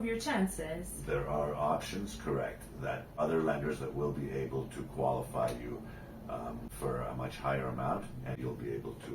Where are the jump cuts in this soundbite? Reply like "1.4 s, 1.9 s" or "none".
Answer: 3.2 s, 6.7 s, 8.4 s

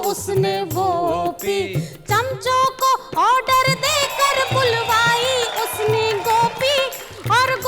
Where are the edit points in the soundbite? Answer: 4.1 s

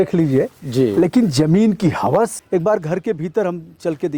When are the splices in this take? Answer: 2.4 s

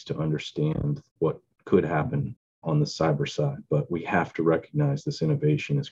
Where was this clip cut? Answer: 1.1 s

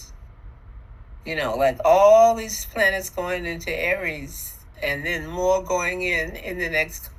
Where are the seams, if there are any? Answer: none

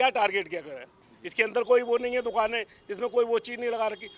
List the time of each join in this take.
none

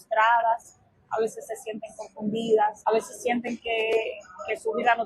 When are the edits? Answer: 2.8 s

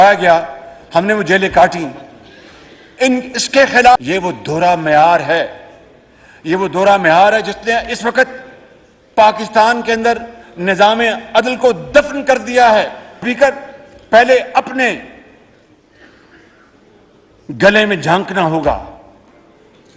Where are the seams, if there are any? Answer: none

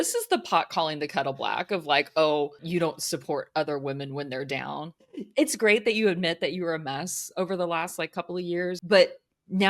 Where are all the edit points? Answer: 2.6 s, 4.9 s, 8.8 s

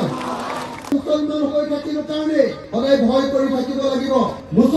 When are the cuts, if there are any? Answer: 0.9 s

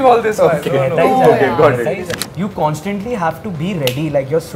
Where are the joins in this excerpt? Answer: 2.2 s

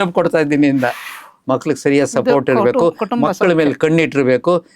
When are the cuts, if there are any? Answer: 1.3 s

